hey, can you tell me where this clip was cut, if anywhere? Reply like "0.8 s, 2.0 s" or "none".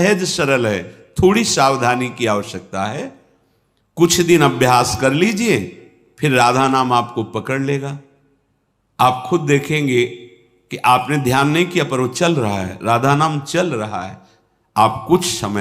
none